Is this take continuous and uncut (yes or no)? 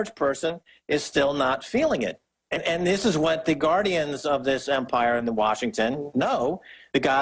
no